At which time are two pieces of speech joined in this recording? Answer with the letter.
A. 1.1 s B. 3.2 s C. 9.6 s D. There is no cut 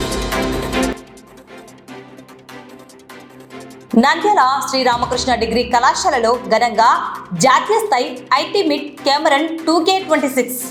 D